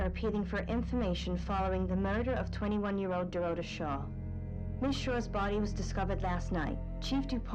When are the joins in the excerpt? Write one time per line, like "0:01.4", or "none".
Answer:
none